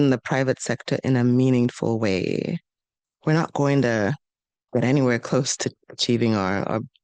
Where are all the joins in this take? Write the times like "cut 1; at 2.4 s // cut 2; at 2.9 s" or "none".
none